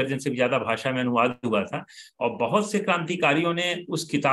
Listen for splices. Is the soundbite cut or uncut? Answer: uncut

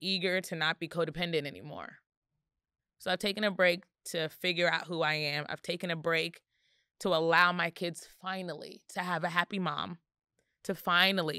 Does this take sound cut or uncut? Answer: uncut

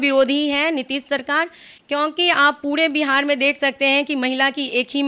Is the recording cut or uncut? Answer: uncut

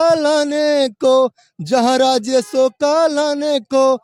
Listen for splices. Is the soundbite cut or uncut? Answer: uncut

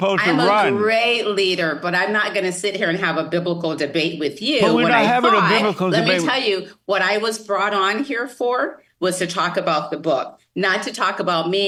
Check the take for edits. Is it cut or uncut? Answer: uncut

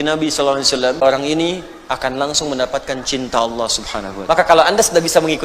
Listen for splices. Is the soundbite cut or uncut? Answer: cut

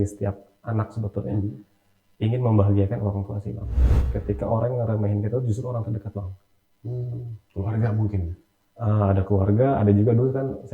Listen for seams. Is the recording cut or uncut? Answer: cut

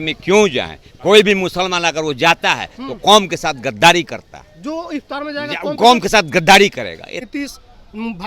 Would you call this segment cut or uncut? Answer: cut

